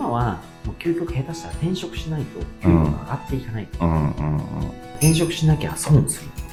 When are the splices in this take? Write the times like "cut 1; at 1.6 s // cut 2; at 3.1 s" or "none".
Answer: none